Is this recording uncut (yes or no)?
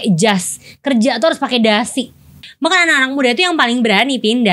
no